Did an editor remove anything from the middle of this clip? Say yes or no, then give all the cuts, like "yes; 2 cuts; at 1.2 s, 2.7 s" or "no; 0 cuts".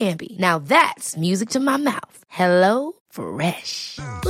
no; 0 cuts